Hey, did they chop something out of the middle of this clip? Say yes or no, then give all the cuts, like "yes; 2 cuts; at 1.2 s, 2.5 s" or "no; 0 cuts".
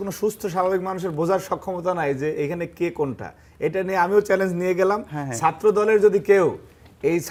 no; 0 cuts